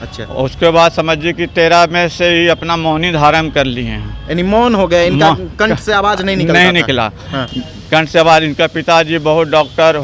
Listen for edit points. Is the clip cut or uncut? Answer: uncut